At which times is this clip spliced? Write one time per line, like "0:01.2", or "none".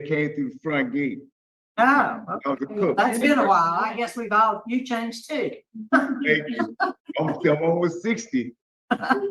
none